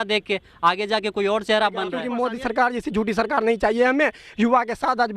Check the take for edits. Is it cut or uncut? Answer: cut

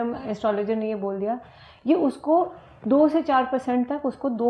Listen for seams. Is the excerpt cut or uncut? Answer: uncut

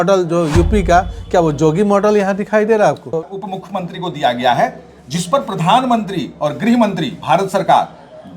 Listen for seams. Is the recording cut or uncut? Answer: cut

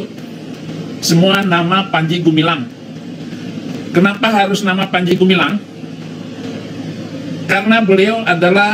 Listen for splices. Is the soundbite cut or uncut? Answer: uncut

